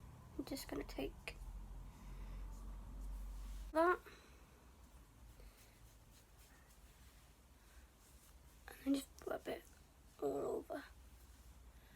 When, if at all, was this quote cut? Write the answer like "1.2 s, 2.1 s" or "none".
3.7 s